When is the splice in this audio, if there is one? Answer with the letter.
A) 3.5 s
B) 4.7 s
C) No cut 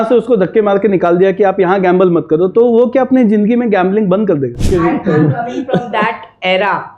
B